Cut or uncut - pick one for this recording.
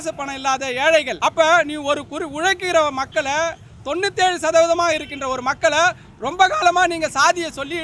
cut